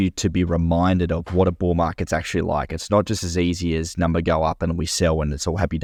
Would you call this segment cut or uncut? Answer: uncut